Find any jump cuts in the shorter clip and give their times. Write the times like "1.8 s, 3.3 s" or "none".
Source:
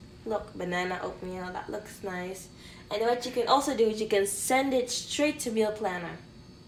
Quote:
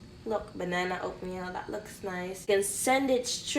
2.4 s